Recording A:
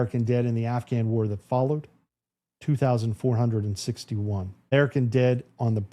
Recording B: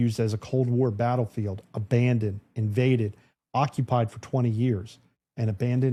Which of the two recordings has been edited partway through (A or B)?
A